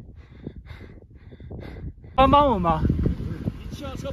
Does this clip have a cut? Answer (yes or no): yes